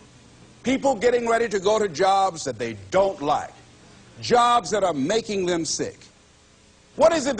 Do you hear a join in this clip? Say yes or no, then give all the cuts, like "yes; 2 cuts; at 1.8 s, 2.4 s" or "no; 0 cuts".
yes; 1 cut; at 6.3 s